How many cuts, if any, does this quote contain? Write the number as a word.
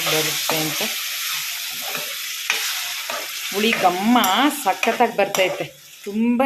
zero